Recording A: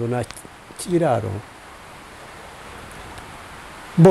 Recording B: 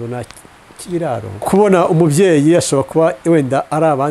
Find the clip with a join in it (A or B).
B